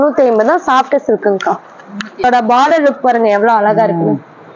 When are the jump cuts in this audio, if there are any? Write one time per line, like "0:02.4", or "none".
0:02.2